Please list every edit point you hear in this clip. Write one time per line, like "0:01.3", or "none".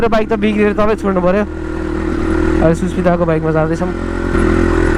none